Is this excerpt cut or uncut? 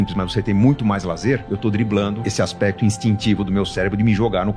cut